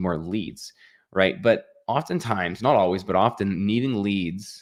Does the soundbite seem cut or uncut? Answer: uncut